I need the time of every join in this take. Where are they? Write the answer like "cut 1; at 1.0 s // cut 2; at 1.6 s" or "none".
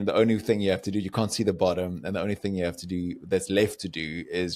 none